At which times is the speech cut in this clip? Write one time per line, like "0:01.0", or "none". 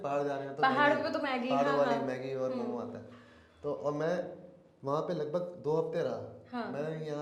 none